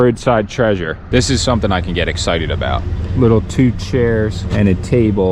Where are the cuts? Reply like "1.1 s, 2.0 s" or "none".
0.9 s, 3.0 s, 4.4 s